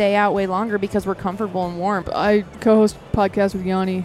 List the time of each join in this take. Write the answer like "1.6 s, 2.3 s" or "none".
2.1 s